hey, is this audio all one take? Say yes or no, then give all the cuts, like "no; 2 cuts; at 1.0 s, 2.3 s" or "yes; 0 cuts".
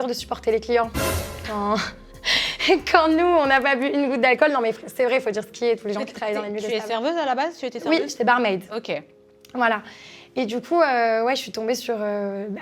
yes; 0 cuts